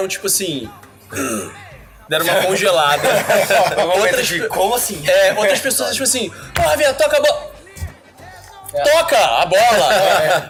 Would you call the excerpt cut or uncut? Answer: uncut